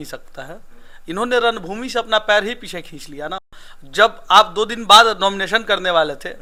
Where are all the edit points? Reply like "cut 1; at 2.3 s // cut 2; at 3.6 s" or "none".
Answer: none

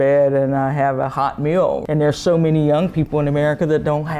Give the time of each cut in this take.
cut 1; at 1.8 s

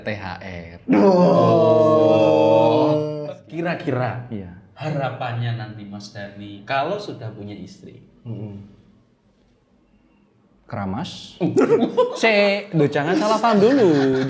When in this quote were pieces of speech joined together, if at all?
cut 1; at 3.2 s // cut 2; at 6.6 s

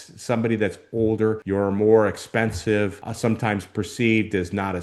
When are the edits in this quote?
cut 1; at 1.4 s // cut 2; at 3.0 s

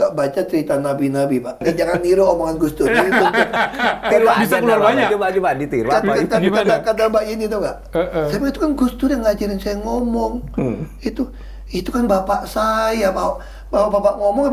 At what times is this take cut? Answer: cut 1; at 1.6 s

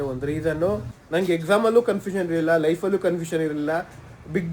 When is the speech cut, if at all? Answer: cut 1; at 0.9 s

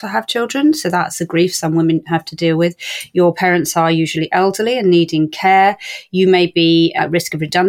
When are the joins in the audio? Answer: cut 1; at 1.2 s

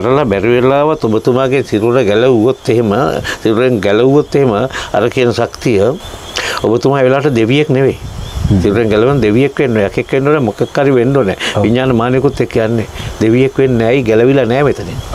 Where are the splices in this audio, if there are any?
none

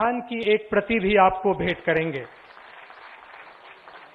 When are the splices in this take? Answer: none

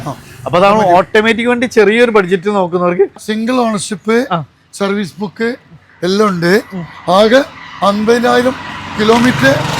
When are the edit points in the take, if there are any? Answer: cut 1; at 3.3 s

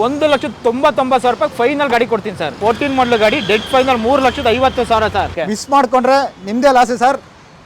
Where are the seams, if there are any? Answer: cut 1; at 2.5 s // cut 2; at 5.4 s

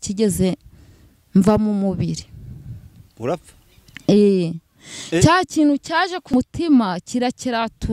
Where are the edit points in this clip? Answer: cut 1; at 6.3 s

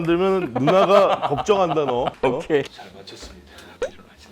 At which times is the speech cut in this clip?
cut 1; at 2.8 s

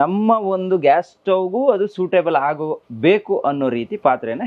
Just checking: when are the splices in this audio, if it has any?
none

